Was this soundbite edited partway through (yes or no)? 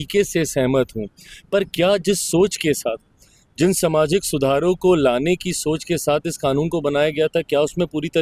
no